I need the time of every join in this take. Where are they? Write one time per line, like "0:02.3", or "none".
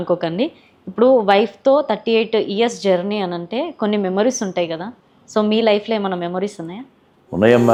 none

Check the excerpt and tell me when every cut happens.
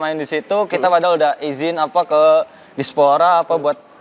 none

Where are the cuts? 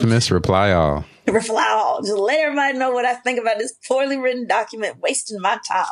none

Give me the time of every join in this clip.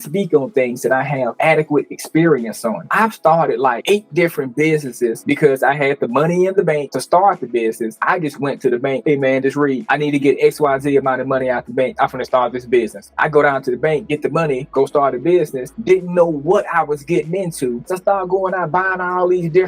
0:05.2
0:13.0
0:17.9

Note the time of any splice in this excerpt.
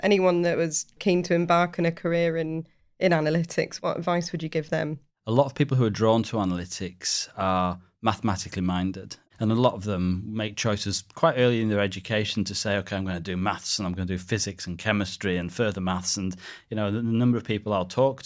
0:01.0
0:03.7
0:05.1

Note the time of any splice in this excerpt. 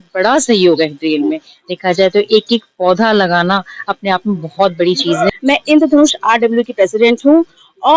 0:05.3

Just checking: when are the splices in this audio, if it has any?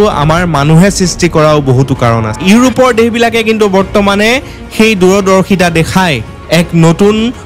0:02.3

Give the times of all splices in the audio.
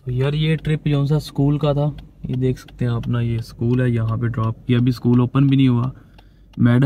none

